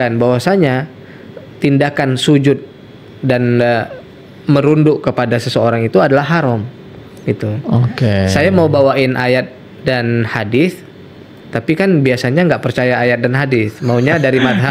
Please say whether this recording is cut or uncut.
uncut